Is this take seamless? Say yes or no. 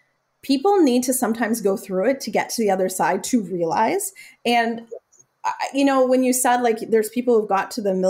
yes